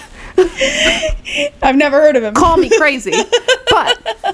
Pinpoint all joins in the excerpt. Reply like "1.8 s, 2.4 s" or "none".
none

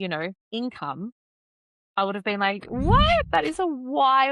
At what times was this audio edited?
none

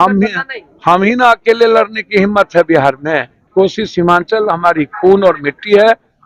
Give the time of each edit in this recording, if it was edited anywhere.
3.4 s

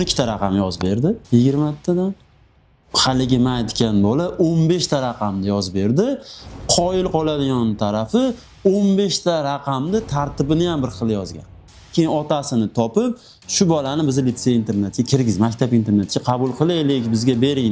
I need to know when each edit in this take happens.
11.9 s

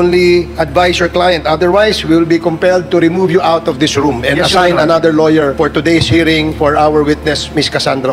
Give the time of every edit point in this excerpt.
5.5 s, 6.5 s

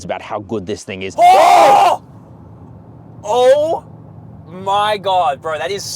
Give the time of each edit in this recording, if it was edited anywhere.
1.0 s

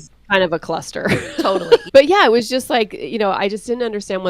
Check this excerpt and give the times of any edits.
1.8 s

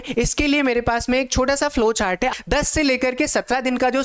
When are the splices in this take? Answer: 2.3 s

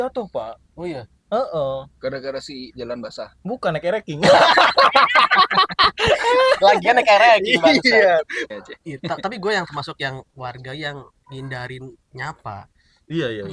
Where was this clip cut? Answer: 8.4 s

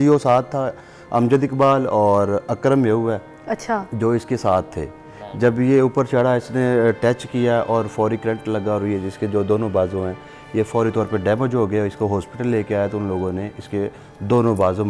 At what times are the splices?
none

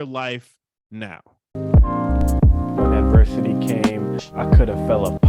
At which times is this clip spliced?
1.4 s

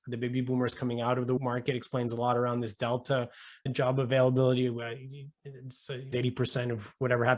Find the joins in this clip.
1.4 s, 6.1 s

